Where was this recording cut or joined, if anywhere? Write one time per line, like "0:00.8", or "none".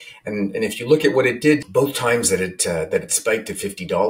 0:01.7